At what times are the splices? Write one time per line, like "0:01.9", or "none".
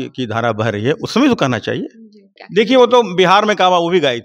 0:02.4